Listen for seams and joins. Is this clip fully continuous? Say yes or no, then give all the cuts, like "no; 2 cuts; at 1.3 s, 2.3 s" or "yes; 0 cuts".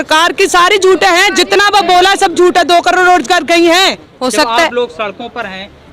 no; 1 cut; at 4.1 s